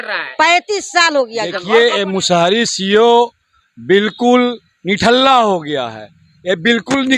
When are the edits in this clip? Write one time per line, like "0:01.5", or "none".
0:01.6